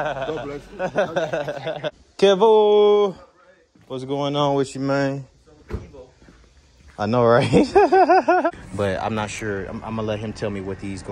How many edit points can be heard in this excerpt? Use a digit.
2